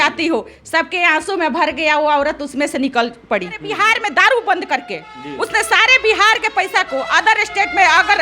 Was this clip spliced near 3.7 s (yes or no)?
yes